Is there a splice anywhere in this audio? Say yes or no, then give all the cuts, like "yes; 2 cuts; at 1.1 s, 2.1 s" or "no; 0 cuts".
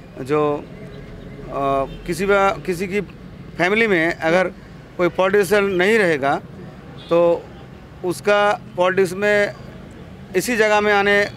no; 0 cuts